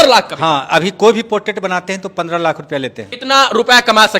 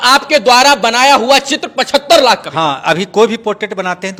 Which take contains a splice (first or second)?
first